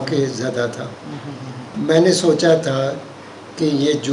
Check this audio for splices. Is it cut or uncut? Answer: cut